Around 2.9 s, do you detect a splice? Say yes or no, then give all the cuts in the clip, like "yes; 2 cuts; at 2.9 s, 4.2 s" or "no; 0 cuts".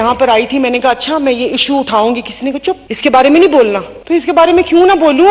yes; 2 cuts; at 2.9 s, 3.9 s